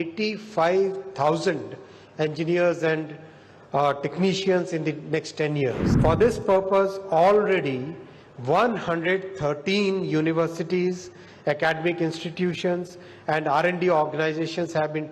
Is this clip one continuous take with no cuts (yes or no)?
no